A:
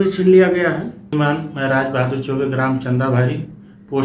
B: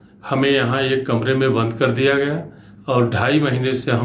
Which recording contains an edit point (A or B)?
A